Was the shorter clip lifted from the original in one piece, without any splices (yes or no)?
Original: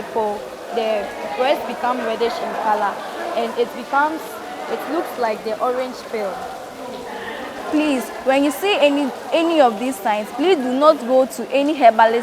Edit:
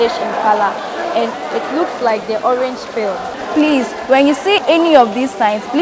no